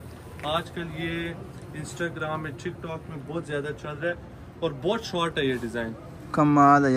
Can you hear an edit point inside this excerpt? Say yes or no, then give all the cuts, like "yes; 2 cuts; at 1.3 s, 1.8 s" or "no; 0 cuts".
no; 0 cuts